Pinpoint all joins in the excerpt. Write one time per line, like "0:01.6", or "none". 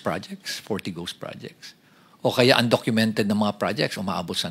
none